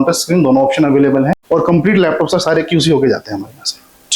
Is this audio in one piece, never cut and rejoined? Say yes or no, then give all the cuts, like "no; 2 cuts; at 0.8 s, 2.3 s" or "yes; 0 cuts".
no; 1 cut; at 1.4 s